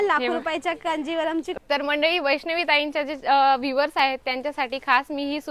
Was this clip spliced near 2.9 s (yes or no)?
no